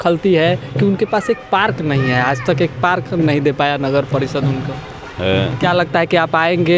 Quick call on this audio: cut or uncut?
uncut